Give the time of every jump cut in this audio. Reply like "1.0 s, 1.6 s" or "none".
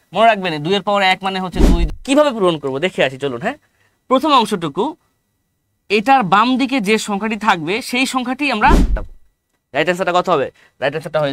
1.9 s, 9.0 s